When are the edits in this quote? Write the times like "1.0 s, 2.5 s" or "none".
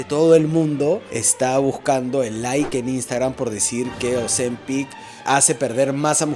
1.2 s, 5.2 s